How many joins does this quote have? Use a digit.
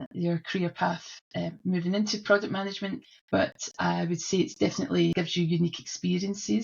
2